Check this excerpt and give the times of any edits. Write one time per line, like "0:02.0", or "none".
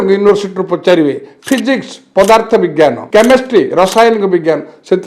0:03.0